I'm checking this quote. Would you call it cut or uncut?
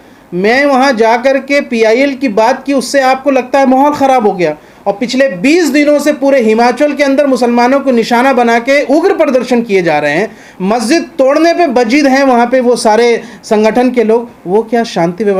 uncut